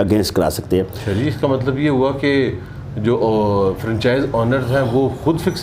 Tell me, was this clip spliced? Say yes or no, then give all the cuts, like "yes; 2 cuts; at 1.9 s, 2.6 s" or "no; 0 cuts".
no; 0 cuts